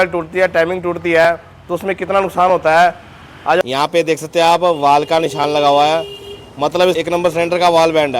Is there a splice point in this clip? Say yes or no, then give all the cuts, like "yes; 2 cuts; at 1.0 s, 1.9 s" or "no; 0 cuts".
yes; 2 cuts; at 3.6 s, 7.0 s